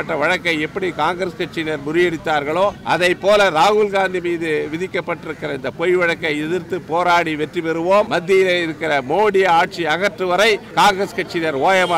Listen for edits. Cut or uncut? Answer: cut